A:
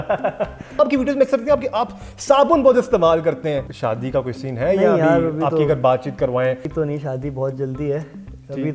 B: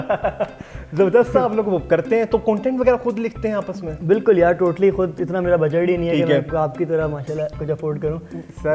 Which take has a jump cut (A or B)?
A